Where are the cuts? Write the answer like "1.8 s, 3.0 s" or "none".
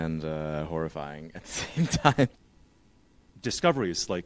2.4 s